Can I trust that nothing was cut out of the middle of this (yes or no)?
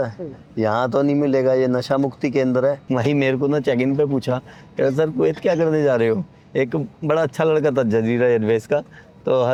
yes